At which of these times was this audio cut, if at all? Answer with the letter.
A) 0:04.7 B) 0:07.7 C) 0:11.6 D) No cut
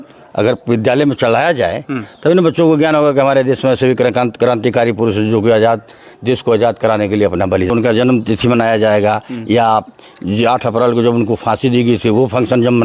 B